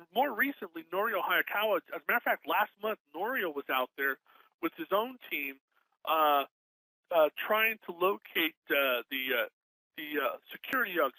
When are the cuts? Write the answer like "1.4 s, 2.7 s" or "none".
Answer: 1.9 s